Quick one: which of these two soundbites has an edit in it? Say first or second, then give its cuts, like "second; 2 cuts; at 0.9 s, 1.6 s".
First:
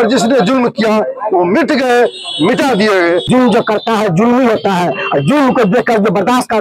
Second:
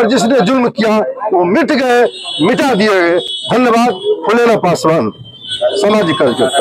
first; 1 cut; at 3.2 s